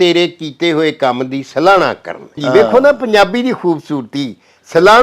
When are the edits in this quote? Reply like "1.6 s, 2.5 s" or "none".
2.4 s